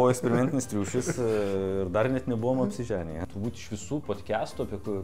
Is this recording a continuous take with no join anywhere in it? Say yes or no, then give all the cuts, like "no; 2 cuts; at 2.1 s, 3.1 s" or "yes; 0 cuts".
no; 1 cut; at 3.2 s